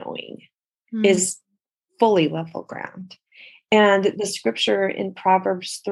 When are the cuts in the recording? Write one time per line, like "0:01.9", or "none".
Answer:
none